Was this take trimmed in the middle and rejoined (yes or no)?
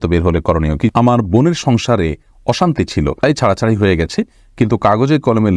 yes